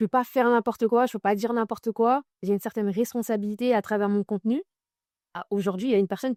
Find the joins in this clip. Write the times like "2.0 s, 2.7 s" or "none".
none